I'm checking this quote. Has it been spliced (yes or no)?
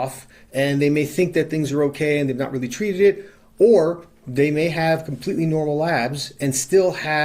no